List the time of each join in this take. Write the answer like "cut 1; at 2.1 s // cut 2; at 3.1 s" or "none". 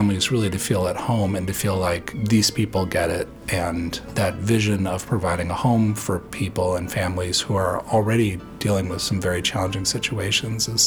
cut 1; at 2.1 s // cut 2; at 4.0 s